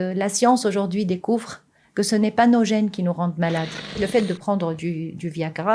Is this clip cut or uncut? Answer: cut